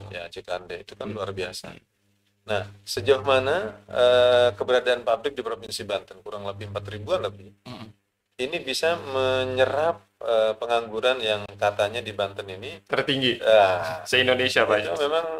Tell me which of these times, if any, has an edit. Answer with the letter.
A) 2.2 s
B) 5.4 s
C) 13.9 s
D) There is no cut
D